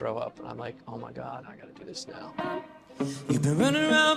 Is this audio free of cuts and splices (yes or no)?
no